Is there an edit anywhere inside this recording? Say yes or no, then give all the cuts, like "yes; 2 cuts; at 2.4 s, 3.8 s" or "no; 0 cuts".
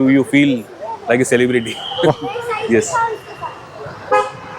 no; 0 cuts